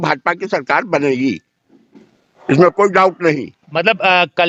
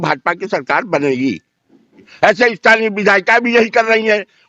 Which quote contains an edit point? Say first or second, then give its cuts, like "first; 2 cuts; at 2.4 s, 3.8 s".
second; 1 cut; at 2.0 s